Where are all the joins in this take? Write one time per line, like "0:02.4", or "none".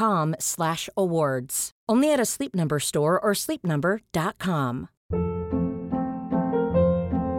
0:04.9